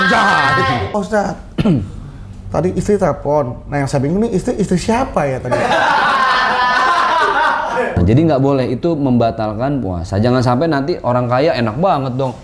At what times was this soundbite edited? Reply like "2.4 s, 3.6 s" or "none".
0.9 s, 8.0 s